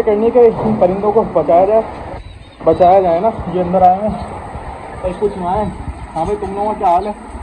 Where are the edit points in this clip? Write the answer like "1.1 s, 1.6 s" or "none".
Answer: none